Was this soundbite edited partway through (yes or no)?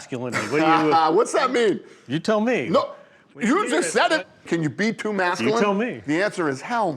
yes